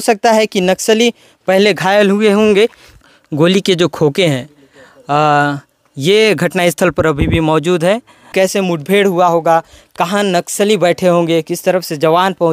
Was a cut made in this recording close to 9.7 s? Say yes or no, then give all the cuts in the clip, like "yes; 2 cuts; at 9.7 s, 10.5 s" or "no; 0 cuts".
no; 2 cuts; at 2.9 s, 8.3 s